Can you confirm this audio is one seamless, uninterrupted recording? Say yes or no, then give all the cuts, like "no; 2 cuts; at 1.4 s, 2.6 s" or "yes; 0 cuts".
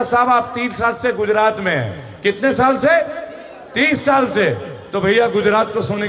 yes; 0 cuts